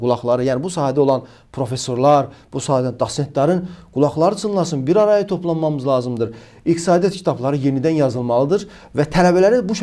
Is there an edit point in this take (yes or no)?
no